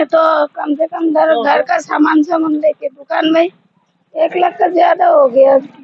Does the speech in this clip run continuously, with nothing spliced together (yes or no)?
yes